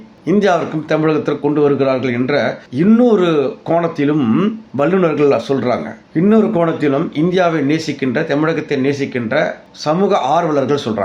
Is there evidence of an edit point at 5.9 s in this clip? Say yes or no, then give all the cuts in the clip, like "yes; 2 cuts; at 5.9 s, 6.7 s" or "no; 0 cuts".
no; 0 cuts